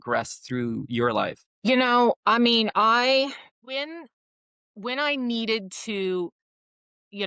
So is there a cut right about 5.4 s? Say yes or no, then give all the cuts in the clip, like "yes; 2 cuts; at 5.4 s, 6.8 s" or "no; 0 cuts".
no; 2 cuts; at 1.5 s, 3.5 s